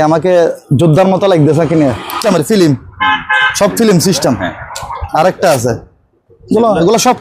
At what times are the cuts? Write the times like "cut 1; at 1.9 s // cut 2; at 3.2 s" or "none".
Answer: cut 1; at 2.2 s